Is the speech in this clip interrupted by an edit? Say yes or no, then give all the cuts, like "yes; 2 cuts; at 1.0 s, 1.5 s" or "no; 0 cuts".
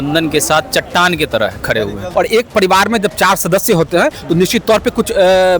yes; 1 cut; at 2.0 s